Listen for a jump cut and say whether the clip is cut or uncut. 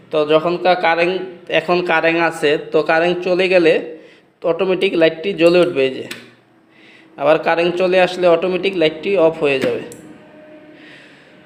uncut